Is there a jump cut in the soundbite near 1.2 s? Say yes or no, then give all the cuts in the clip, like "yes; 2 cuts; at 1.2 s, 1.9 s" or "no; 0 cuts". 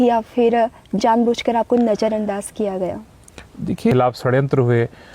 no; 1 cut; at 3.9 s